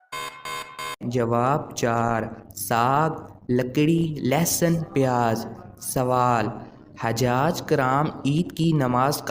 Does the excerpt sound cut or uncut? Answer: cut